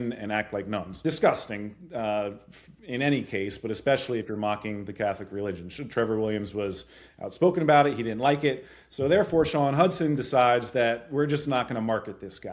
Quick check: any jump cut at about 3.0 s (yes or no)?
no